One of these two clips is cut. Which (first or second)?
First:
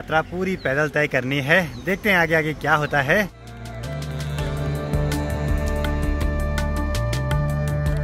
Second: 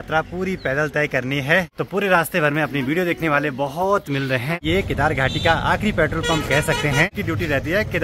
second